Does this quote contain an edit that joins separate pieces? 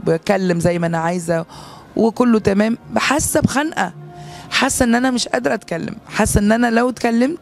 no; 0 cuts

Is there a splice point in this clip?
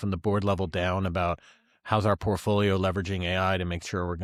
no; 0 cuts

